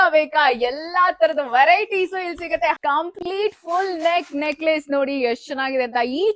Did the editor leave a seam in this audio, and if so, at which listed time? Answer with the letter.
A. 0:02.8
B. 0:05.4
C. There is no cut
A